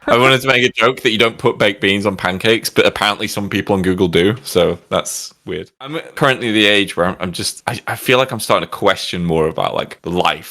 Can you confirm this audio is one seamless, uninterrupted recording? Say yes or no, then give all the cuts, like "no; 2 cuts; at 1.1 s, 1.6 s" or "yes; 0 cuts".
no; 1 cut; at 5.9 s